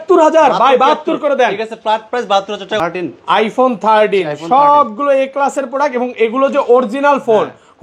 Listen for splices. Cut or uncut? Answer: cut